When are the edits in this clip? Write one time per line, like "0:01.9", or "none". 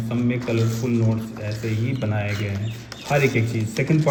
none